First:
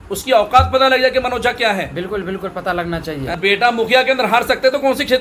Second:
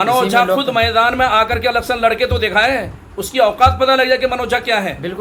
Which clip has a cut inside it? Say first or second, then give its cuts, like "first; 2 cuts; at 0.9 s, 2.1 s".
first; 1 cut; at 3.4 s